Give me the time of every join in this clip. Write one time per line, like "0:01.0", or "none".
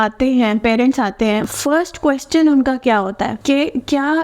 0:01.5
0:03.4